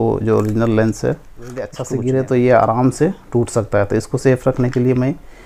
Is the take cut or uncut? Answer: cut